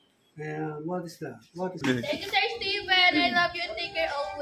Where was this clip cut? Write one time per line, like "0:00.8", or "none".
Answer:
0:01.8

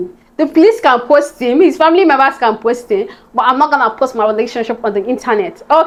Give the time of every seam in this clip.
none

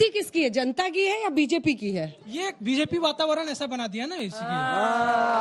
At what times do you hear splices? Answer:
0:04.2

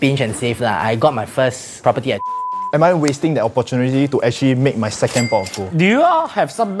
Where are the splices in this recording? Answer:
0:02.7
0:05.6

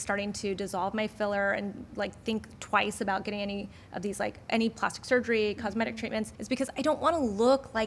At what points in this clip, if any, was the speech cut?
0:06.3

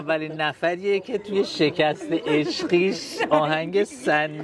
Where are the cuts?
none

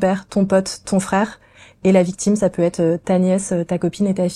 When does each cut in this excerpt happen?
none

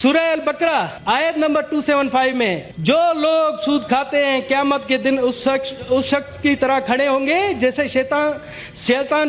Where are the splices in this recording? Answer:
0:00.9
0:02.7

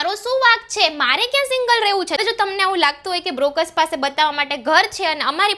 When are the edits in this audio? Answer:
0:02.2

